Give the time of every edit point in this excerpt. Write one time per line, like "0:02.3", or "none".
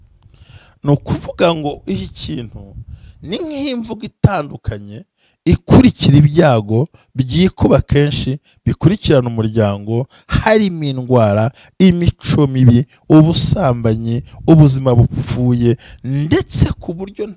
none